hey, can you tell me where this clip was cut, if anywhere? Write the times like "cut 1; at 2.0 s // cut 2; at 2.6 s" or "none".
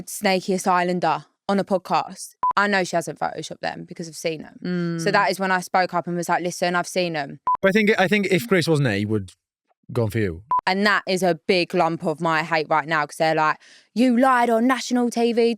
cut 1; at 2.4 s // cut 2; at 7.4 s // cut 3; at 10.4 s